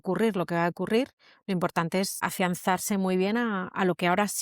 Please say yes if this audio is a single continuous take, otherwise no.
yes